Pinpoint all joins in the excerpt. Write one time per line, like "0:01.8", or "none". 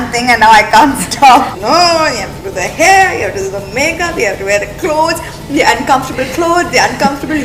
0:01.5